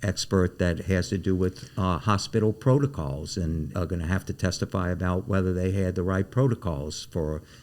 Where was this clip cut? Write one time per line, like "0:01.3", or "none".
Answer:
0:03.7